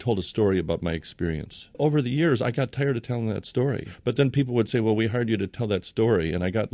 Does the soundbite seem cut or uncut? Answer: cut